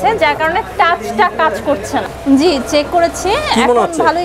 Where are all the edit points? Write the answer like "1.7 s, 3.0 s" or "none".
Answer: 2.1 s